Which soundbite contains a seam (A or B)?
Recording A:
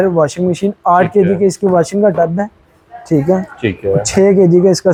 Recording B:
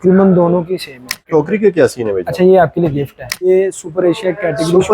B